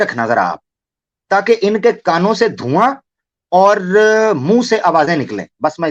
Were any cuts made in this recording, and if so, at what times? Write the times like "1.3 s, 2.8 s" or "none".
none